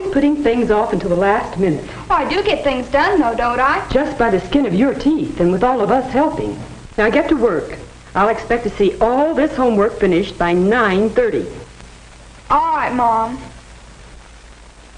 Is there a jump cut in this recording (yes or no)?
no